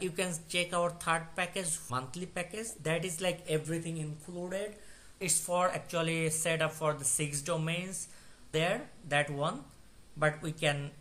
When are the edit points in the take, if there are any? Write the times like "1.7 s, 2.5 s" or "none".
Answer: 1.8 s